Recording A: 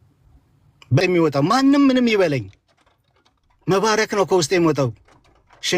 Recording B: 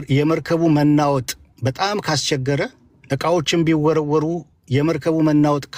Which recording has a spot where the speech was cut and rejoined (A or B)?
A